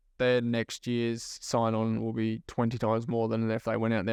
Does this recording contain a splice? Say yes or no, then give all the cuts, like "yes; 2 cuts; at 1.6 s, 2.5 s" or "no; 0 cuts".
no; 0 cuts